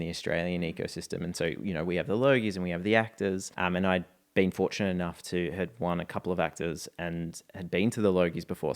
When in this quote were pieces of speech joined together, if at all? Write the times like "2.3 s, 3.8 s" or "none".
3.5 s

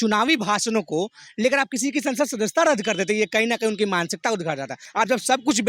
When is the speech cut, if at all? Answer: 4.8 s

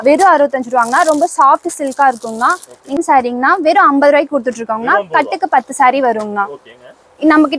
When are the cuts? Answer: 3.0 s

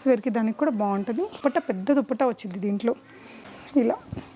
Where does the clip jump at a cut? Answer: 1.3 s

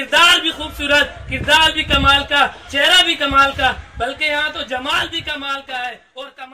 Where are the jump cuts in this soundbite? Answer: none

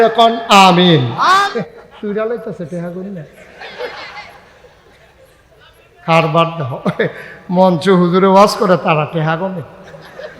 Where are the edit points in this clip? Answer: 1.5 s

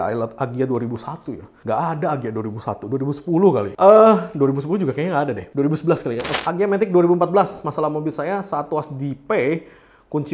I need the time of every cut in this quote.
6.3 s

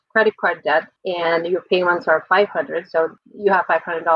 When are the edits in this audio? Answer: 1.0 s, 3.1 s

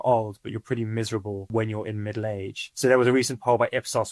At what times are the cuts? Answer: 1.5 s

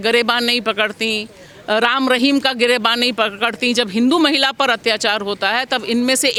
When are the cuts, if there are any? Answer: none

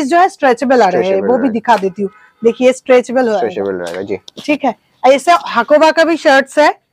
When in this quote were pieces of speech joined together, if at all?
none

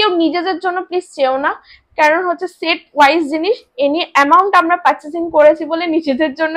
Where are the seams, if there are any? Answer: none

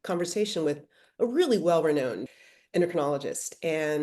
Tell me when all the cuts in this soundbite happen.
2.3 s

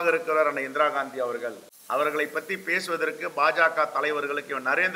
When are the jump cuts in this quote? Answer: 1.7 s

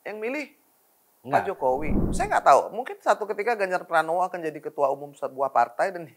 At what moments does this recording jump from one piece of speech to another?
2.0 s

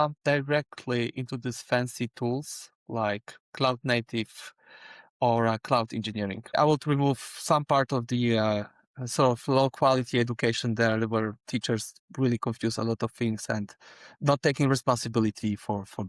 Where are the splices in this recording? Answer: 6.6 s

